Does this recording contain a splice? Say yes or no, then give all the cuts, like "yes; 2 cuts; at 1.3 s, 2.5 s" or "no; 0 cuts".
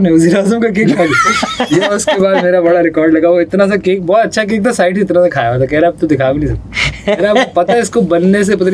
no; 0 cuts